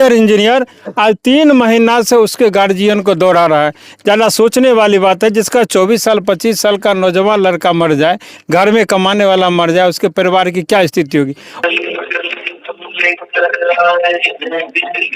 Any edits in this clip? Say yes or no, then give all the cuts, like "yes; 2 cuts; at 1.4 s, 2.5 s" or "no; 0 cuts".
yes; 1 cut; at 11.6 s